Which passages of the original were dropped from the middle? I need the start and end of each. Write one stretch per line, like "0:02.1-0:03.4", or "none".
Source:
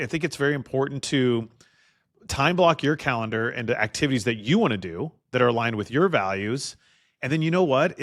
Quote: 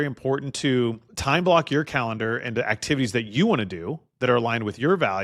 0:01.6-0:02.2